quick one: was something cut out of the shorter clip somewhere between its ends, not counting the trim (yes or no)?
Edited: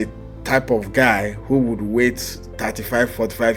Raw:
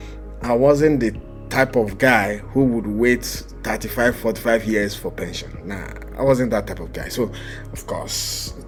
no